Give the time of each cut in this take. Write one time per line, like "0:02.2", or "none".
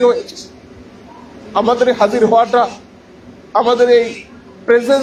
none